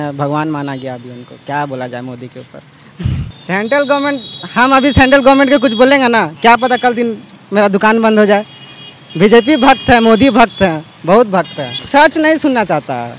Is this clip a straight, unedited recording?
no; 2 cuts; at 3.3 s, 11.8 s

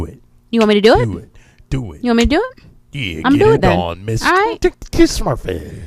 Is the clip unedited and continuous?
no; 1 cut; at 4.7 s

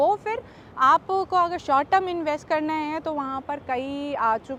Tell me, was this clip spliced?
no; 0 cuts

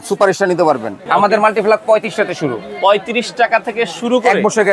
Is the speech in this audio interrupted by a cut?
yes; 1 cut; at 0.9 s

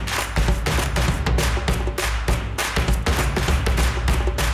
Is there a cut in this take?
no; 0 cuts

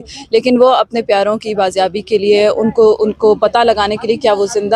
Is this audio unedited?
yes; 0 cuts

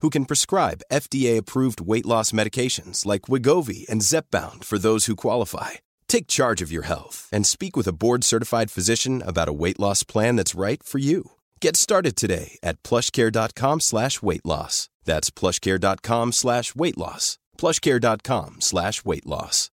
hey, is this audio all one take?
yes; 0 cuts

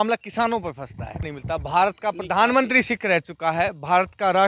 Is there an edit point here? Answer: yes; 1 cut; at 1.3 s

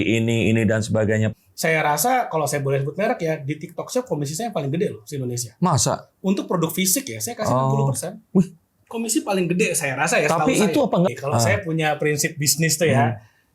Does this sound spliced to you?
yes; 2 cuts; at 1.3 s, 11.1 s

